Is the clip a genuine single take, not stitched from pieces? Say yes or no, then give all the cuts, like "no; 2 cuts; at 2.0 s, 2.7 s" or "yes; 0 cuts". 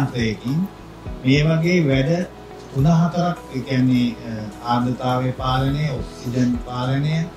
yes; 0 cuts